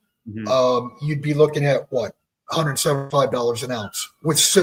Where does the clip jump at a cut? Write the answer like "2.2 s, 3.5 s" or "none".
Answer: none